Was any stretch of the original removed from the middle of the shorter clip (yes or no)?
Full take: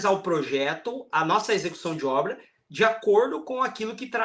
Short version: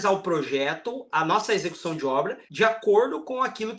yes